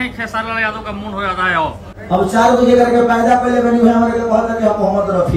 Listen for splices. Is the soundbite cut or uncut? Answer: cut